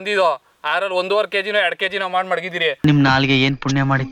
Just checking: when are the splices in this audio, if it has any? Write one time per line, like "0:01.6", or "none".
none